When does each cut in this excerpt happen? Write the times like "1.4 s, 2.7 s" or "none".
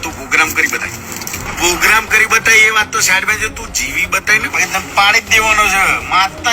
1.5 s, 4.5 s

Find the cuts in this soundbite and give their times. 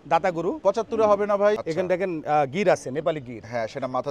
1.6 s

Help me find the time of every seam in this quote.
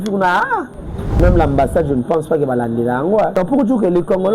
1.2 s, 3.3 s

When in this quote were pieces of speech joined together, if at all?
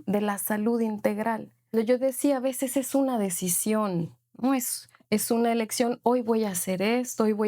1.7 s

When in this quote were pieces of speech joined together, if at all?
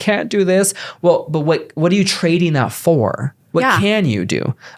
3.3 s

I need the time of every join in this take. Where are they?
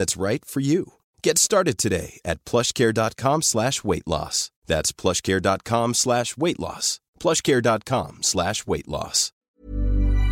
9.4 s

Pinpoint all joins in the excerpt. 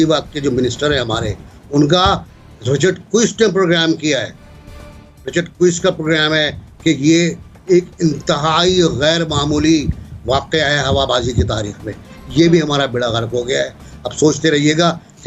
none

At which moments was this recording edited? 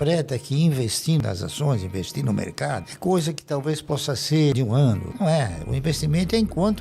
1.2 s, 4.9 s

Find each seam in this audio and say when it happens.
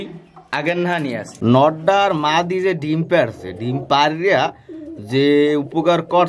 1.3 s

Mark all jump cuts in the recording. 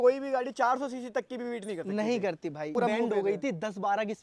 2.7 s

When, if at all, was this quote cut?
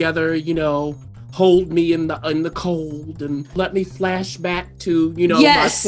3.6 s

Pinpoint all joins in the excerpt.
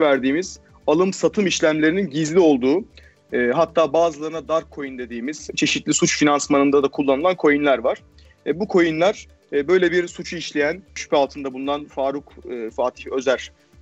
5.5 s, 11.0 s

